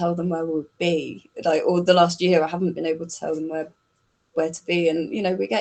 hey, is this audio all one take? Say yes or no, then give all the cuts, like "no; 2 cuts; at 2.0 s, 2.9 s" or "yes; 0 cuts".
yes; 0 cuts